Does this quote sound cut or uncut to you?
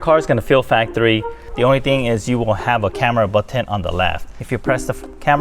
cut